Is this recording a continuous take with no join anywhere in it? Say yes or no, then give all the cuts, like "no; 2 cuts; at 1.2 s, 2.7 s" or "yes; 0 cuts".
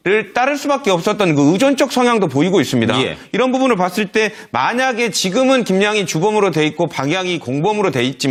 yes; 0 cuts